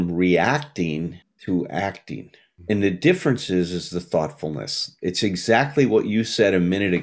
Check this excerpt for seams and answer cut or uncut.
uncut